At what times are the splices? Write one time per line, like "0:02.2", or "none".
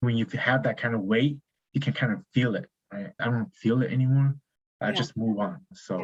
none